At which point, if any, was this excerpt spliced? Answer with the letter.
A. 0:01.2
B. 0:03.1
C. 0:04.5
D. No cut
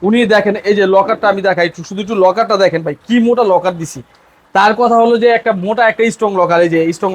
D